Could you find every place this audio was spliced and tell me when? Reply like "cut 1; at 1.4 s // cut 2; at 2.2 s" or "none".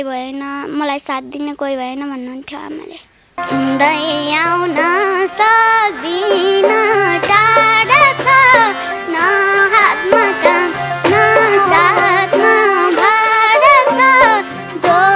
cut 1; at 3.4 s